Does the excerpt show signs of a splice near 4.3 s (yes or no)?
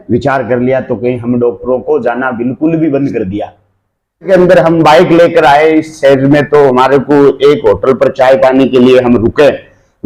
yes